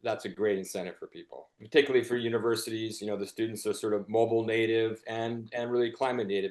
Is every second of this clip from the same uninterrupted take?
no; 1 cut; at 1.6 s

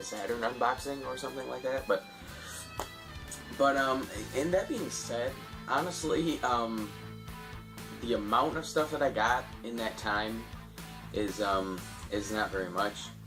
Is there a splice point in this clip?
no; 0 cuts

